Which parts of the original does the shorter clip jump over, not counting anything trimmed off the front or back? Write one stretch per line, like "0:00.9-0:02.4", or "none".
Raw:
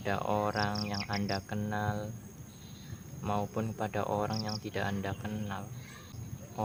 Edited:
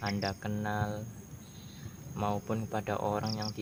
none